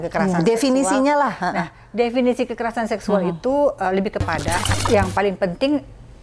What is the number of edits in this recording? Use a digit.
1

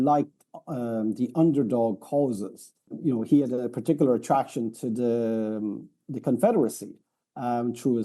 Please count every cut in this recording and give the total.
1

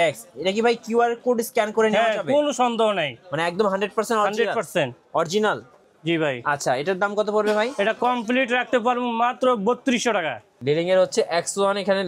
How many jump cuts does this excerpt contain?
1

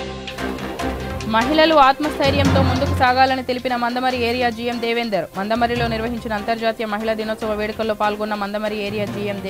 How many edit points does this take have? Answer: 1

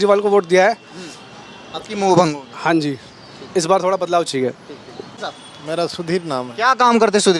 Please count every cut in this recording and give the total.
0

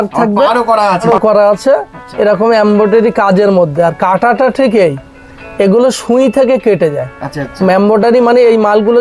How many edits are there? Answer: 1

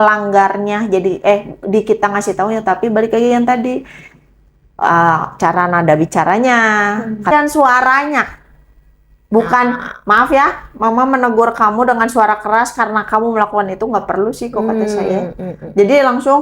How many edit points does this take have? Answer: 1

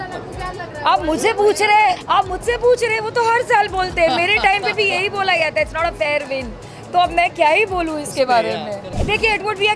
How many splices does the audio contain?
2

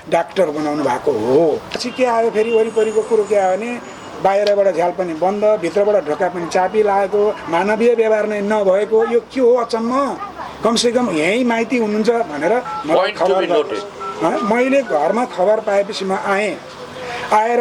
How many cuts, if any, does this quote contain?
1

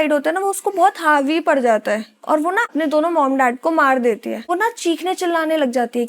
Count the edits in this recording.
2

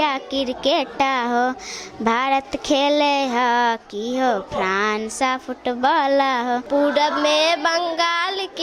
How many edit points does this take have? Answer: 1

